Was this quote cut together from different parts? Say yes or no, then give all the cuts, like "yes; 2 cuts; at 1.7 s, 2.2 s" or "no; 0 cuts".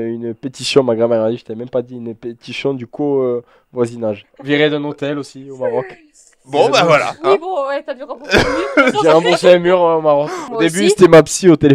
yes; 2 cuts; at 4.2 s, 10.4 s